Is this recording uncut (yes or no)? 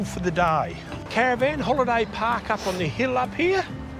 yes